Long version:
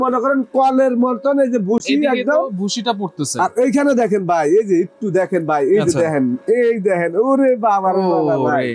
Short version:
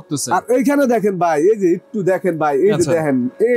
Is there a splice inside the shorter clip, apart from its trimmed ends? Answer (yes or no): no